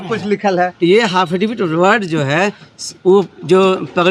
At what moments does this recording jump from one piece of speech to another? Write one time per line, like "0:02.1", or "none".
none